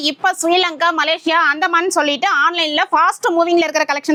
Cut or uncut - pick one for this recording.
uncut